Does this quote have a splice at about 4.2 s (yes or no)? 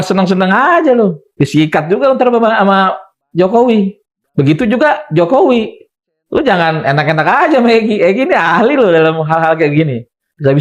yes